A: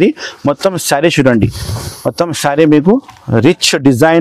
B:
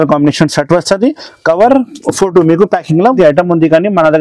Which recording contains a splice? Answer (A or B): B